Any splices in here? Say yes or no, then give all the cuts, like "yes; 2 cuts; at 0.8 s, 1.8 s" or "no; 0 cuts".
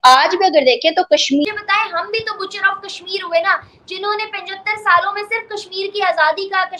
yes; 1 cut; at 1.4 s